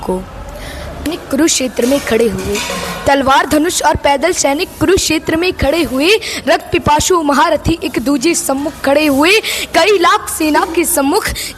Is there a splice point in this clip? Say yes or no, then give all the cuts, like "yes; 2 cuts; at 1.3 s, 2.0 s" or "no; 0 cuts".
yes; 1 cut; at 1.1 s